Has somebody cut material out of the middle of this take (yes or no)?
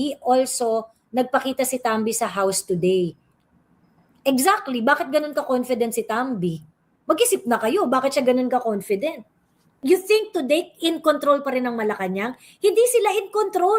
yes